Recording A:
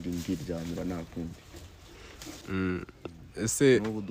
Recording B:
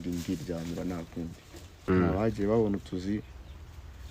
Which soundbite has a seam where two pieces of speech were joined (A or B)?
B